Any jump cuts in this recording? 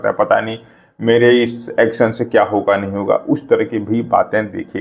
no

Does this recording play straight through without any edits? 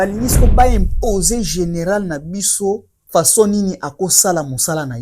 no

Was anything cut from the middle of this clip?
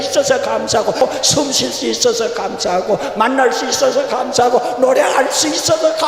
yes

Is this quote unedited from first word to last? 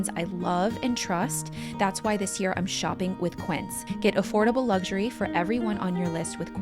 no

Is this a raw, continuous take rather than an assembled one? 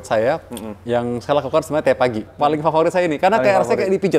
no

